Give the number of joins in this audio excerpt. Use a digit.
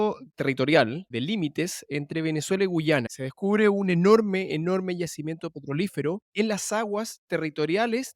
3